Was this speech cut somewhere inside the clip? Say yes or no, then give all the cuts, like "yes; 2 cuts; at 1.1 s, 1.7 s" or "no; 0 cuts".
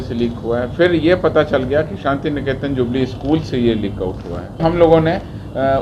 yes; 1 cut; at 4.6 s